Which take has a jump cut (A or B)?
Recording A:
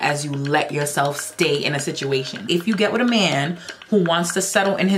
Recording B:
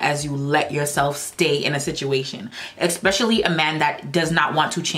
A